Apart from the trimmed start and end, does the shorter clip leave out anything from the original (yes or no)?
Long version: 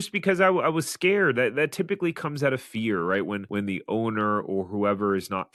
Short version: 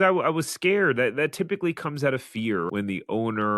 yes